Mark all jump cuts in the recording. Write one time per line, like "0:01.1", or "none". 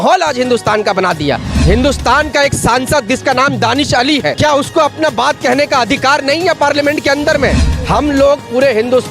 0:01.5
0:04.4
0:07.7